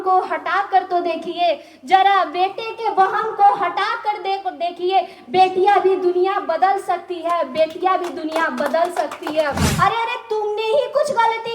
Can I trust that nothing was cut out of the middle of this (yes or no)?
no